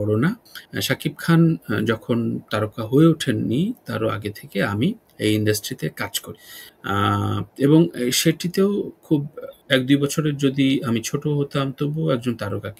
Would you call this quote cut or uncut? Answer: uncut